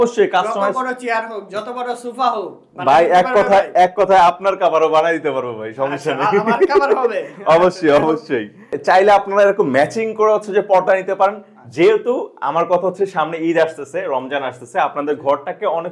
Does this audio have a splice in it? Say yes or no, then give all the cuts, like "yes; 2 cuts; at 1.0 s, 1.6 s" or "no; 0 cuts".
yes; 1 cut; at 8.7 s